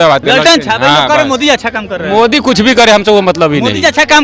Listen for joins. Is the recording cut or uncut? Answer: uncut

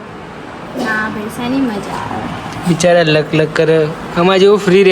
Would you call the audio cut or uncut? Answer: uncut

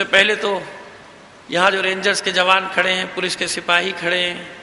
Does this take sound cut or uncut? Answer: cut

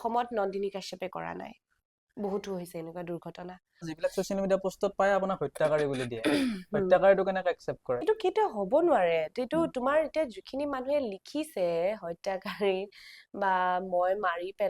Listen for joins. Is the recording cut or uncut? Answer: cut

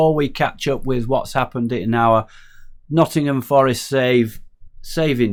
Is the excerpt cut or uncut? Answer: uncut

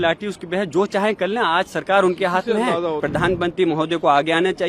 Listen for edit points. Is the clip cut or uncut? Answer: cut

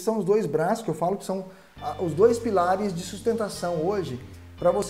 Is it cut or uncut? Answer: uncut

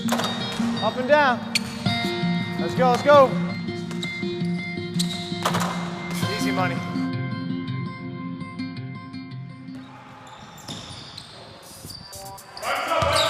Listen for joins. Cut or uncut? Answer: uncut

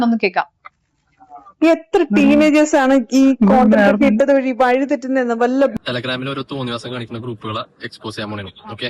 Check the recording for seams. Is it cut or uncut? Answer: cut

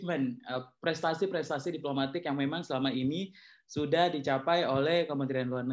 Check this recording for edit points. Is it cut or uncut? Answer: uncut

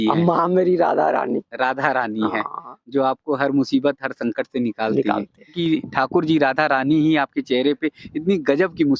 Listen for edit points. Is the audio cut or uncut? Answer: cut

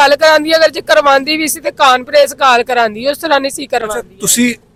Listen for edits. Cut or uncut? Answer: uncut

